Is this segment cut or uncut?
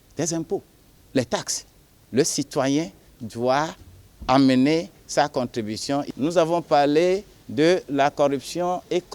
cut